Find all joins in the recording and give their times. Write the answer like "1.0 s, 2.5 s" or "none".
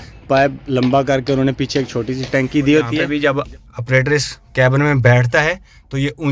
3.1 s